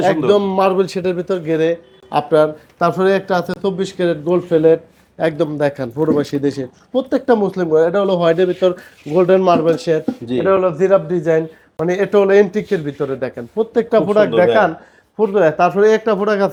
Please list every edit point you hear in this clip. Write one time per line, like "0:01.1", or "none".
none